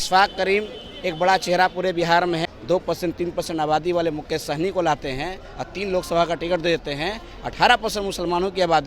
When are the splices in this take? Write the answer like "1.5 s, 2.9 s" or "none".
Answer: 2.5 s